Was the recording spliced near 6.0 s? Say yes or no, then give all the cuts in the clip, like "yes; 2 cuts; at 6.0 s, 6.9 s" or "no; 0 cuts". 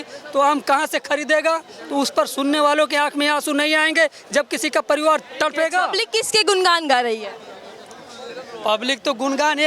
yes; 1 cut; at 6.0 s